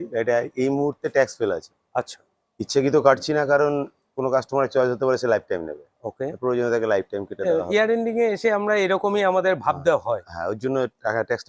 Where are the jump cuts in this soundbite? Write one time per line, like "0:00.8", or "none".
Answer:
none